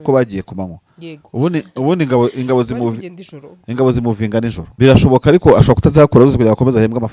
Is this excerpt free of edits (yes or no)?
no